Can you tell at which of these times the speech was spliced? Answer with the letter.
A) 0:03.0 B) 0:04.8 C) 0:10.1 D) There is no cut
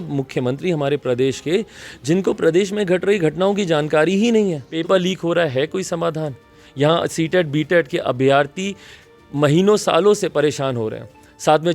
B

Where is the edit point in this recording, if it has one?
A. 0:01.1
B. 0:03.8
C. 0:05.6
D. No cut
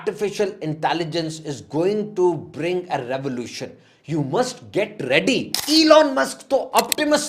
C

